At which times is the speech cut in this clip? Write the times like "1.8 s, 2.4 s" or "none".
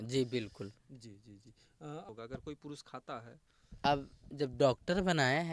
2.1 s